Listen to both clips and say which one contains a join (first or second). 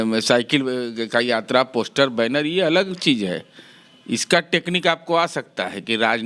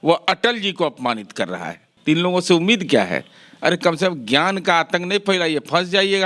second